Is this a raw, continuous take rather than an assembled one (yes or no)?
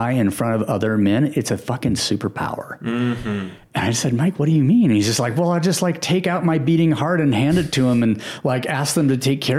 yes